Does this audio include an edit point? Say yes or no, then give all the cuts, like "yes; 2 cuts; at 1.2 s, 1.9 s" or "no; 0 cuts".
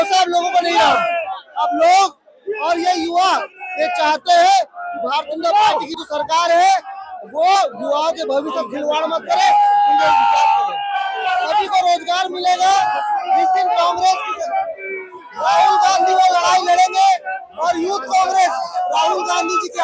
no; 0 cuts